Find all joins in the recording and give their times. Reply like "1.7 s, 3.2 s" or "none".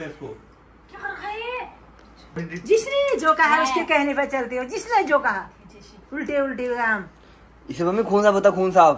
2.4 s